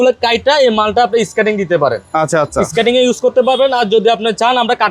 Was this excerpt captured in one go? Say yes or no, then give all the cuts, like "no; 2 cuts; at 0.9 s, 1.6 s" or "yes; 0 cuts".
yes; 0 cuts